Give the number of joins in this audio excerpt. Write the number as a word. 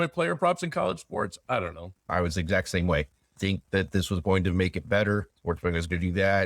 three